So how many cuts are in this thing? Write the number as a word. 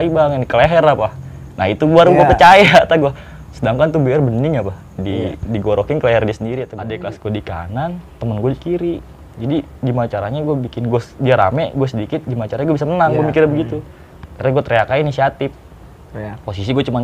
one